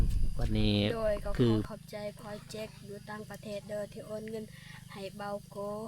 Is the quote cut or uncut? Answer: cut